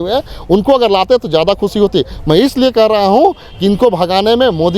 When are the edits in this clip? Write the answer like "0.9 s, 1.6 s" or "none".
none